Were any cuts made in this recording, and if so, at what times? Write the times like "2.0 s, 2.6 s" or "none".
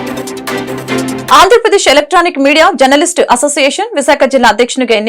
1.2 s